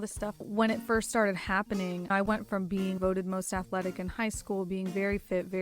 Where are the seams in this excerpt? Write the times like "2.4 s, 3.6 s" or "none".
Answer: 3.0 s